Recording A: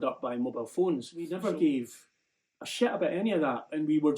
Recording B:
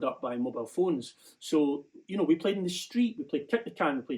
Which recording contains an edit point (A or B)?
A